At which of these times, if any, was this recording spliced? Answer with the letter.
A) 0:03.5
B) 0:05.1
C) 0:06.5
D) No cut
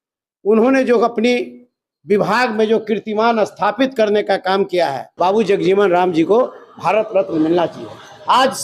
B